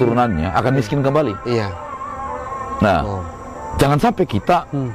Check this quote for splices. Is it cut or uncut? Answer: uncut